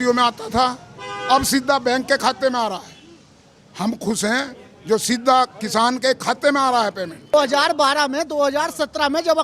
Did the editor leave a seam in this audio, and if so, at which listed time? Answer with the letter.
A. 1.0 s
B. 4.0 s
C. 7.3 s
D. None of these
C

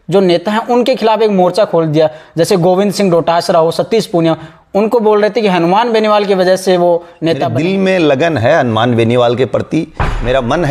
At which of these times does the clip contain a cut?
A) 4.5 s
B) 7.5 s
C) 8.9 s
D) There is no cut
B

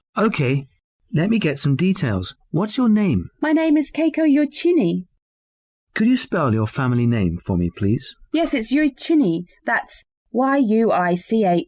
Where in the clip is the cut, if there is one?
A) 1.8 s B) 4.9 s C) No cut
C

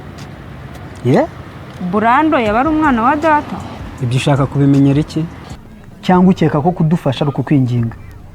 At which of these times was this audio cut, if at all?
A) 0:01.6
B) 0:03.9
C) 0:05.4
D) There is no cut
C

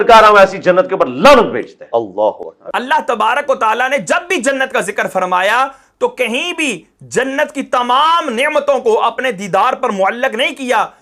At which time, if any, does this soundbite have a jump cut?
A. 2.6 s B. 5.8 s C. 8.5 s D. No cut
A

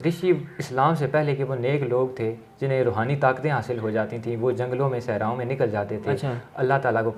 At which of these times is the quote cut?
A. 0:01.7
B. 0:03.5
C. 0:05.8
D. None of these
D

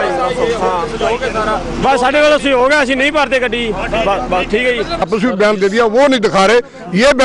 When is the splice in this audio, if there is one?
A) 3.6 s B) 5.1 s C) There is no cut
B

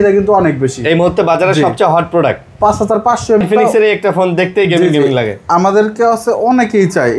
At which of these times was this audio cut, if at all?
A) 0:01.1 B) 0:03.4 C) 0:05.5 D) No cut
B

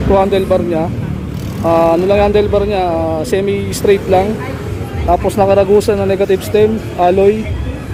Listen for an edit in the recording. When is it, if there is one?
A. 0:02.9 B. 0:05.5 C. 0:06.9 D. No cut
D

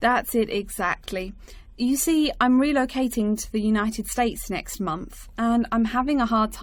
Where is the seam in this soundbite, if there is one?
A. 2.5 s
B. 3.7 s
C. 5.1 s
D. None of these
D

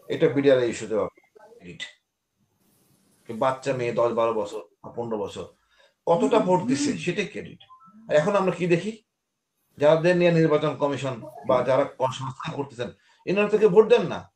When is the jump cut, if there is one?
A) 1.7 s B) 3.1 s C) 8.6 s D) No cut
A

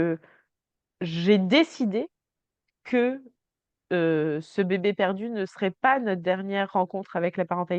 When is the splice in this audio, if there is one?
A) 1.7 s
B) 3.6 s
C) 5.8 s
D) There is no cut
D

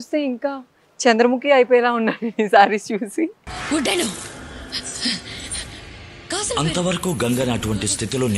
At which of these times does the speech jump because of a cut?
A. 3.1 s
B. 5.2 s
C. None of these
C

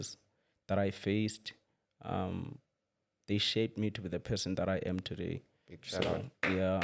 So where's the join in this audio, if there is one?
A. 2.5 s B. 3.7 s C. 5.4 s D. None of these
D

